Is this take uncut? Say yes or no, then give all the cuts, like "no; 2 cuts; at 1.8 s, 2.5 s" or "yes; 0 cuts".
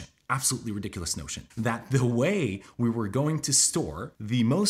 no; 1 cut; at 1.4 s